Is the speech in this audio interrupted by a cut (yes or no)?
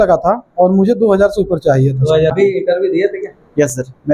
yes